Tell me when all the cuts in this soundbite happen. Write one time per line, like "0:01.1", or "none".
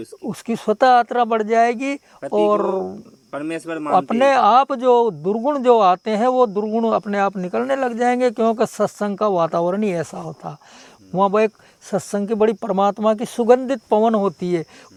none